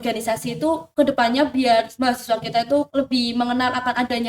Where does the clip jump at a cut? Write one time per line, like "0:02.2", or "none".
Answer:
0:00.9
0:01.9
0:02.9